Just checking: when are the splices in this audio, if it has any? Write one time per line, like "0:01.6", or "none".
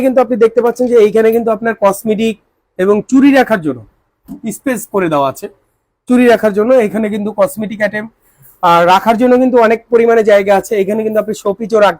none